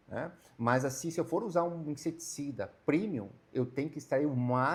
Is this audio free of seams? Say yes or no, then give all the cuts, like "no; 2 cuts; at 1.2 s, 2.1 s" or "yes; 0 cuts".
yes; 0 cuts